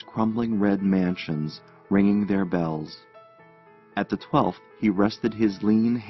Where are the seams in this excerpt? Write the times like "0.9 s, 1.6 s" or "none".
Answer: 5.0 s